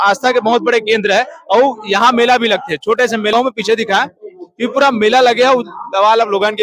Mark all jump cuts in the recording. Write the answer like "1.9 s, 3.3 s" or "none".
3.3 s